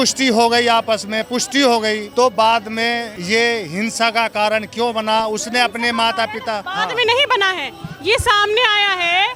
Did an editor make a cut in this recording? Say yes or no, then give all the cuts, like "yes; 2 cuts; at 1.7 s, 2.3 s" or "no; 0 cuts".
no; 0 cuts